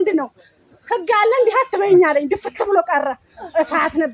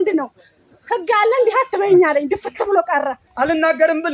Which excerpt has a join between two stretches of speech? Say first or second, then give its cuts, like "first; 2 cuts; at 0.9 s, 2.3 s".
second; 1 cut; at 3.2 s